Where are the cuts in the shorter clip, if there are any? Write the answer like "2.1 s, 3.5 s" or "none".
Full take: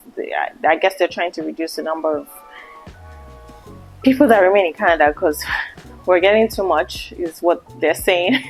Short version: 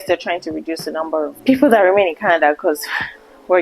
1.4 s